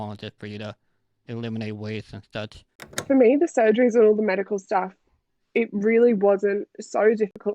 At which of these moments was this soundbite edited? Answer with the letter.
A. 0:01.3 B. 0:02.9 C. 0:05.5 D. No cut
B